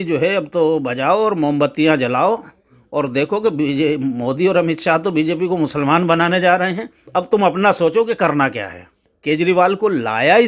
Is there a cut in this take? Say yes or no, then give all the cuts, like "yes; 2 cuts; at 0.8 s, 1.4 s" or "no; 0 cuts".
yes; 1 cut; at 9.1 s